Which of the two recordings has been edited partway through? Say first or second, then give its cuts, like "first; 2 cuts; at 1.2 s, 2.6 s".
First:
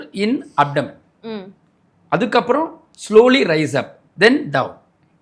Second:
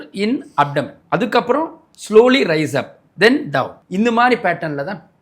second; 2 cuts; at 1.0 s, 3.8 s